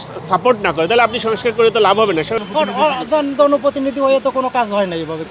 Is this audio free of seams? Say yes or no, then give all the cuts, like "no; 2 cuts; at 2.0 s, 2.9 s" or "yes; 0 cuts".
no; 1 cut; at 2.4 s